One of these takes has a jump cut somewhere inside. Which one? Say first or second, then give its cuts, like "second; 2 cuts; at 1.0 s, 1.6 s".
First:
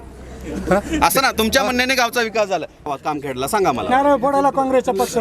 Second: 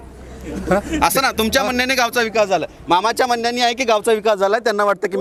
first; 1 cut; at 2.9 s